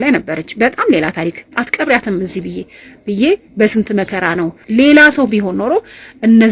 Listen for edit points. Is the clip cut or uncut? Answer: cut